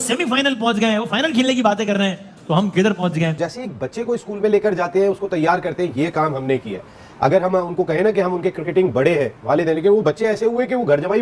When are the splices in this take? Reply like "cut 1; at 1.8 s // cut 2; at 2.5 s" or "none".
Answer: cut 1; at 3.4 s

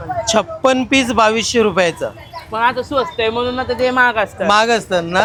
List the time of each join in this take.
none

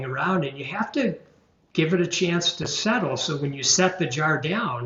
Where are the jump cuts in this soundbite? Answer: none

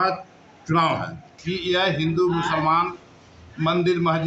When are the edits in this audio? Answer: cut 1; at 1.3 s

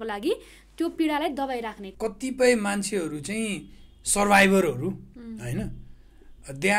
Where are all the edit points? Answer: cut 1; at 1.8 s

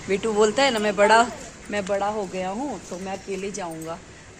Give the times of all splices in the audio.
none

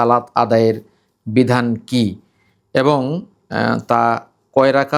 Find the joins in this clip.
none

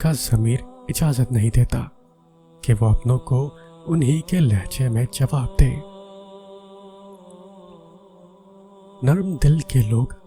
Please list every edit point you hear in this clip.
cut 1; at 6.4 s // cut 2; at 9.0 s

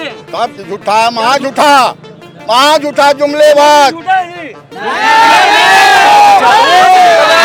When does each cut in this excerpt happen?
none

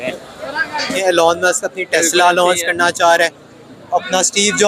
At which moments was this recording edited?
cut 1; at 1.0 s

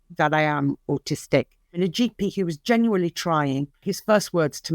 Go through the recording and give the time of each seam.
cut 1; at 1.8 s // cut 2; at 3.9 s

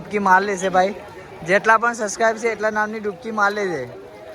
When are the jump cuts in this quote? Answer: none

